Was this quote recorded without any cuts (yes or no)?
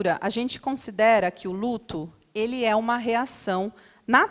yes